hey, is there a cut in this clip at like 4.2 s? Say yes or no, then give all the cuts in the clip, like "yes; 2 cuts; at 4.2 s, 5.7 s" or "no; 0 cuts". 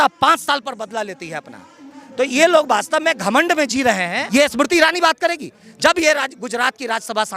yes; 1 cut; at 4.2 s